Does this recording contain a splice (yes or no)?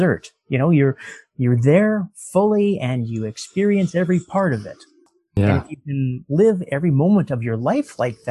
yes